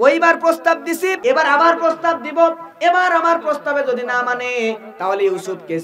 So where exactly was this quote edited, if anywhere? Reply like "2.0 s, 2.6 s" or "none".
1.2 s